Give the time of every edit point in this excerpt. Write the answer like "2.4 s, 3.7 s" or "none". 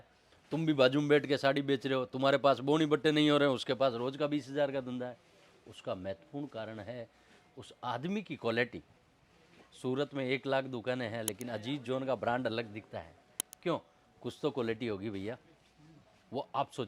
none